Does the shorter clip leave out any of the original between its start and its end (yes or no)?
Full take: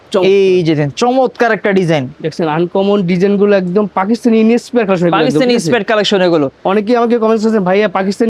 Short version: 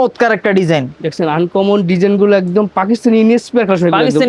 no